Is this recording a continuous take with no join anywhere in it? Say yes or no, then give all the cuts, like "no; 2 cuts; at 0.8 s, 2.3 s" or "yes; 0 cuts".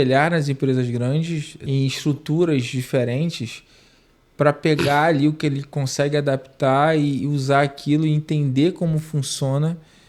no; 1 cut; at 1.5 s